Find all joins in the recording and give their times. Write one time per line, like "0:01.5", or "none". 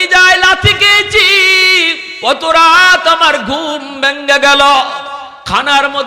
0:02.0